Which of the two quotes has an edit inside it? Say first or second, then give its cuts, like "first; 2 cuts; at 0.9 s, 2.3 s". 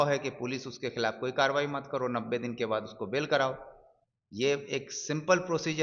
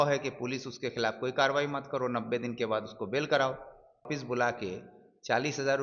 second; 1 cut; at 4.1 s